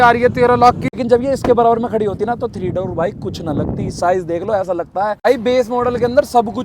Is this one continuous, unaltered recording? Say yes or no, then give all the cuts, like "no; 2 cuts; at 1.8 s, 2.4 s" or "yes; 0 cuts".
no; 2 cuts; at 0.9 s, 5.3 s